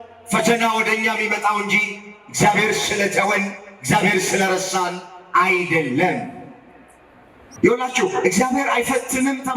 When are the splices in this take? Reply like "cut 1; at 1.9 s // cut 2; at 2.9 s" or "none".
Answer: cut 1; at 7.4 s